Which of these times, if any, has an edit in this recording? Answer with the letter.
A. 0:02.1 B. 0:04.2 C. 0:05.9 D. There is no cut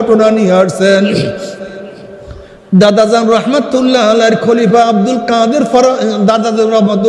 D